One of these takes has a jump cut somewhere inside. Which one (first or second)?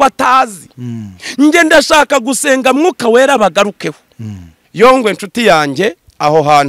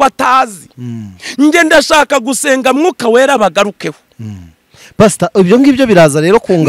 first